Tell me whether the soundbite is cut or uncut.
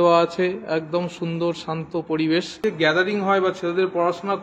cut